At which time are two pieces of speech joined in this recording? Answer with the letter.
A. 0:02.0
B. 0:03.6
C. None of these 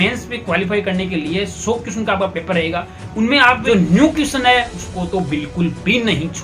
B